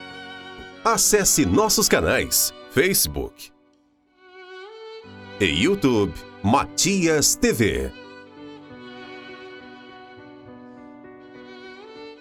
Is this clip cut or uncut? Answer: uncut